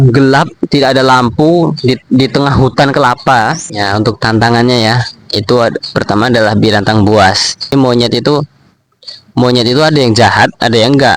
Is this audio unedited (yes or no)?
no